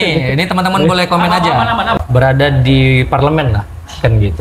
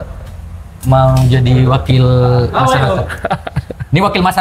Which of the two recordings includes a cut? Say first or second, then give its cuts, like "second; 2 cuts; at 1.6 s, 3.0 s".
first; 1 cut; at 2.0 s